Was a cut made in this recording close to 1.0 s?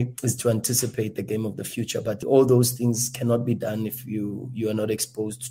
no; 0 cuts

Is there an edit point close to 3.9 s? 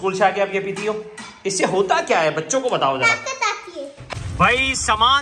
yes; 1 cut; at 3.9 s

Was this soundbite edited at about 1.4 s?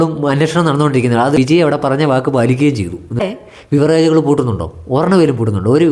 yes; 2 cuts; at 1.4 s, 3.2 s

